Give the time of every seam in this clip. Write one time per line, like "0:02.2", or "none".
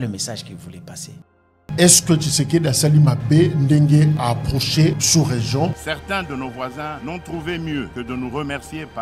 0:01.6

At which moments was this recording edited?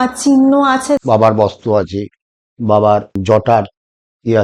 0:01.0
0:03.2

